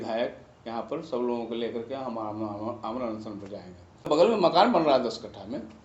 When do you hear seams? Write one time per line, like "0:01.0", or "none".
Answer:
0:04.1